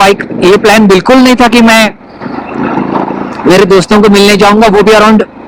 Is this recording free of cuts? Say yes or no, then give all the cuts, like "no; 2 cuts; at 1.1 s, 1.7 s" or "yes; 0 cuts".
yes; 0 cuts